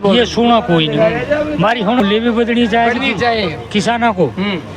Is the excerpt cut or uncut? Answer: cut